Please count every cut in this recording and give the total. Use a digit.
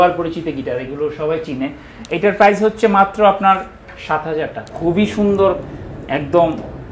1